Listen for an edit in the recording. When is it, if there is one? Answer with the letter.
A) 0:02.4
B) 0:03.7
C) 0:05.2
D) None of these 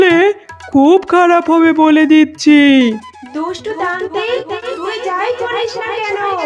D